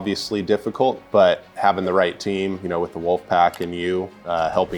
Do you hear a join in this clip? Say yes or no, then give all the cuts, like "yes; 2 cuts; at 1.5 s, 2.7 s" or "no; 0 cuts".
no; 0 cuts